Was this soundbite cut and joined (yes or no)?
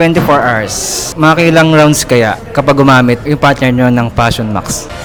no